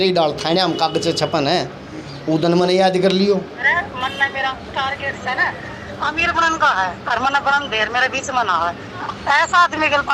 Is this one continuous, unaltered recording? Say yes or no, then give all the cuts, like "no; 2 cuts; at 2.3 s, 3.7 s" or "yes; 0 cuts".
no; 2 cuts; at 3.6 s, 9.1 s